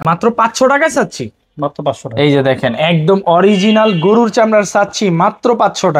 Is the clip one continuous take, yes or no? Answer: yes